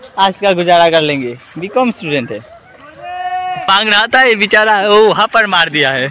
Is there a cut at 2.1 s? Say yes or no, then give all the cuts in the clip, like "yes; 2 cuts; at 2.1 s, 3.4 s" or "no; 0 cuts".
no; 1 cut; at 3.7 s